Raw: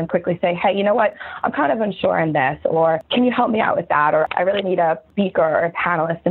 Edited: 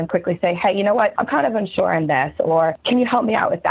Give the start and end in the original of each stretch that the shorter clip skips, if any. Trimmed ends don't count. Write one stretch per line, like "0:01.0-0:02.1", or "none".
0:01.2-0:01.4